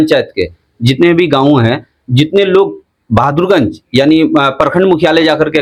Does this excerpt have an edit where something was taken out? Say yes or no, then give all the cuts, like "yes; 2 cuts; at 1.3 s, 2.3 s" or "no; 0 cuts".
no; 0 cuts